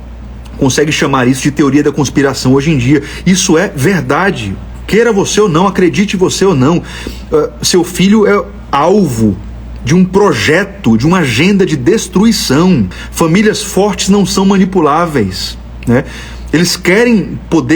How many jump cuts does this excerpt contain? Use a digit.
1